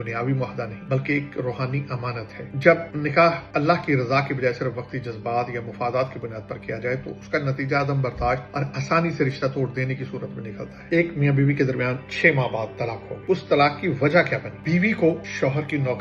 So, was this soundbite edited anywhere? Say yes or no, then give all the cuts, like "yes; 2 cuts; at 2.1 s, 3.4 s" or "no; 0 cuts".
no; 0 cuts